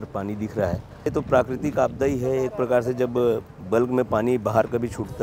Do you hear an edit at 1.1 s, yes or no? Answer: yes